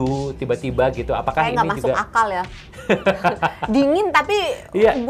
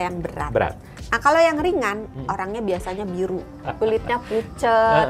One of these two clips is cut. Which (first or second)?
second